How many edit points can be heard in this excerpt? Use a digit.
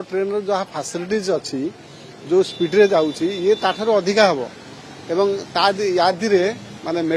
0